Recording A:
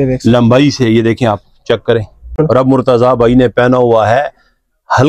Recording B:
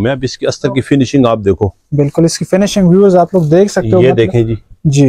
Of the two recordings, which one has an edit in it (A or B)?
A